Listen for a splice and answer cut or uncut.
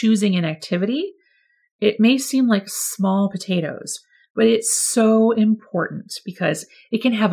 uncut